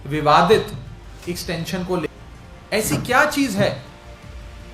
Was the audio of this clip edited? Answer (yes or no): yes